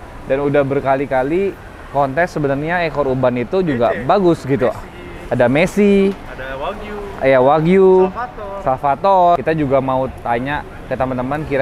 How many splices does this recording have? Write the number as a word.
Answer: one